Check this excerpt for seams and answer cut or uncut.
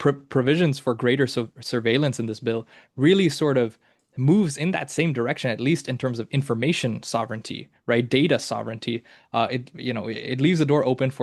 uncut